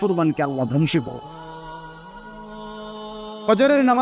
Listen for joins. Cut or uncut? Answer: uncut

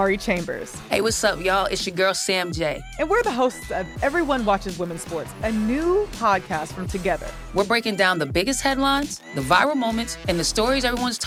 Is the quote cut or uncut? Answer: uncut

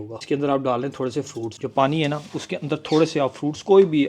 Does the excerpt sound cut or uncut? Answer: uncut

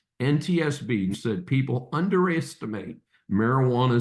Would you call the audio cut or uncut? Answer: cut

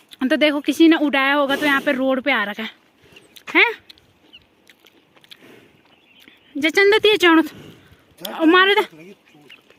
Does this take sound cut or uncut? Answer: uncut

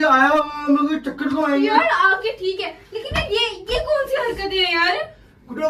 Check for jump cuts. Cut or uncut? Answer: uncut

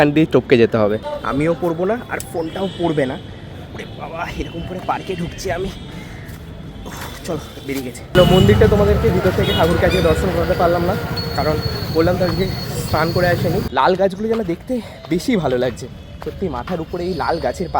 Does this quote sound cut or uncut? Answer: cut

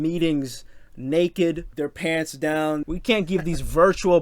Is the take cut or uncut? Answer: cut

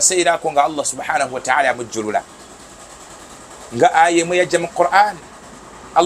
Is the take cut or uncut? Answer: uncut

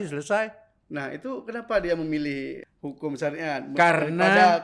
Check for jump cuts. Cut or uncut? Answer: cut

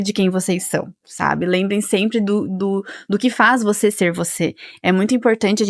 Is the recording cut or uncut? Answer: uncut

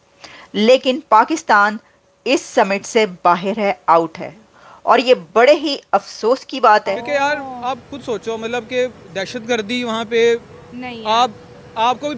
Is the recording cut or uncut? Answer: cut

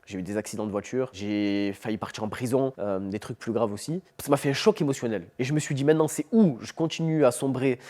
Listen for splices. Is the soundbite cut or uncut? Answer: cut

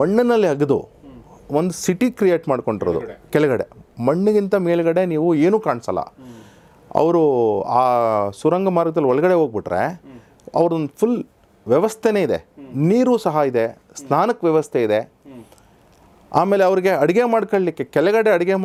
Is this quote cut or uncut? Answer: uncut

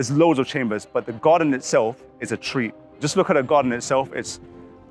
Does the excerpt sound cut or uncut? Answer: uncut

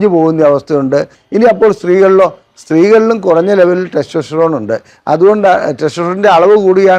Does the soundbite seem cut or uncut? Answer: cut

